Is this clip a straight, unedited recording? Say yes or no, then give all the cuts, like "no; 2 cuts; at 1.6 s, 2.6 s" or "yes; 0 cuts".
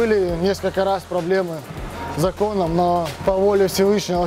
no; 1 cut; at 3.1 s